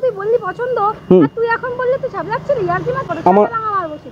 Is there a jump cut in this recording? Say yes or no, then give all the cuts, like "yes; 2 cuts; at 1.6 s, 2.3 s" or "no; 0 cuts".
yes; 1 cut; at 3.1 s